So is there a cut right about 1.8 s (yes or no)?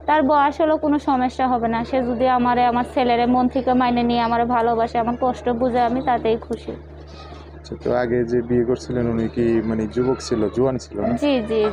no